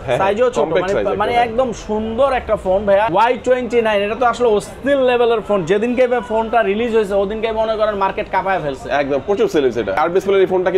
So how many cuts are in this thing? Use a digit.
2